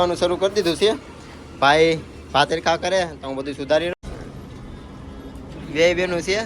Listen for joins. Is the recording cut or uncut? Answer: cut